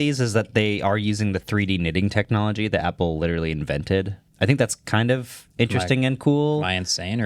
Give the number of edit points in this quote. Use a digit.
1